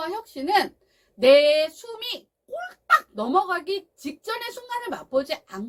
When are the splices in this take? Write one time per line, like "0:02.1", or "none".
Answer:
none